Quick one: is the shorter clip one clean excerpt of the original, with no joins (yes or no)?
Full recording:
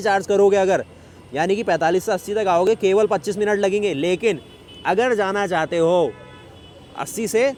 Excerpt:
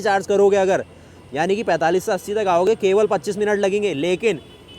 yes